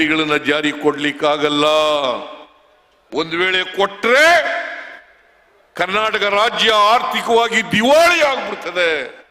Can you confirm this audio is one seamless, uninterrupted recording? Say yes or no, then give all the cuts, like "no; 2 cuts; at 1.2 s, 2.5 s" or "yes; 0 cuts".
yes; 0 cuts